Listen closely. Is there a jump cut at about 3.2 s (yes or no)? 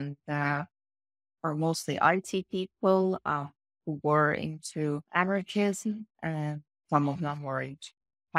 no